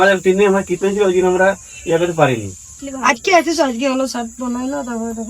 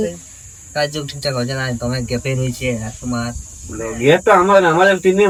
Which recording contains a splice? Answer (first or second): first